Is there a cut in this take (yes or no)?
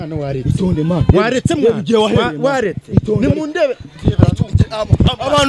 no